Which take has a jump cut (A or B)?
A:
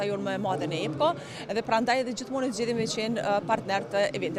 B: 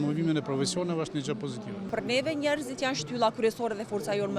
B